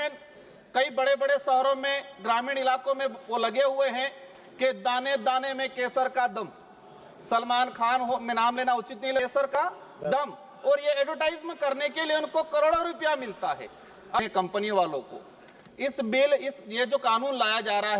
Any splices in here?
yes; 2 cuts; at 9.2 s, 14.2 s

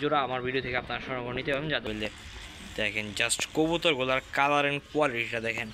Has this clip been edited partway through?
yes; 1 cut; at 1.8 s

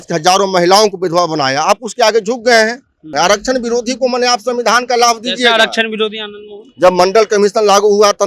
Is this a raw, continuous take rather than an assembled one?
no; 1 cut; at 3.1 s

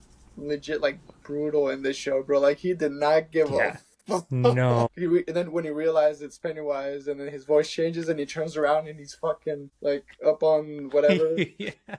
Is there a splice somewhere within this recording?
yes; 2 cuts; at 4.9 s, 9.7 s

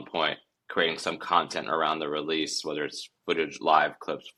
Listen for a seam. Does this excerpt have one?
no; 0 cuts

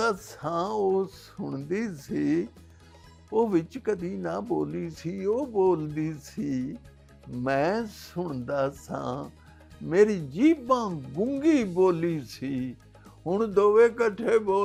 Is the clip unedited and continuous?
yes; 0 cuts

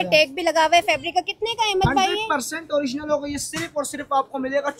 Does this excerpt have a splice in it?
no; 0 cuts

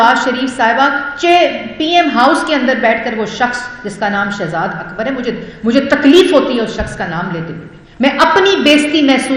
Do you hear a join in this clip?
no; 0 cuts

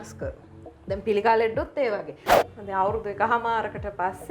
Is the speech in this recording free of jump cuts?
no; 1 cut; at 2.4 s

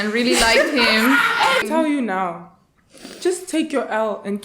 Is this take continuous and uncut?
no; 1 cut; at 1.6 s

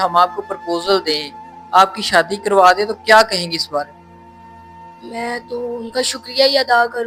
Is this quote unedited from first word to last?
yes; 0 cuts

